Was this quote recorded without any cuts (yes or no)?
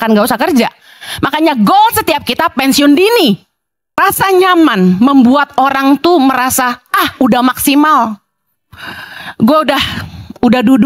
no